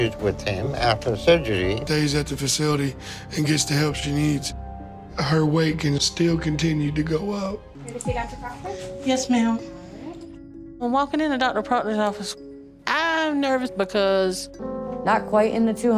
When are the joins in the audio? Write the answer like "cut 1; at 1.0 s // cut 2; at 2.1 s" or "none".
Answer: cut 1; at 1.8 s // cut 2; at 7.7 s // cut 3; at 14.4 s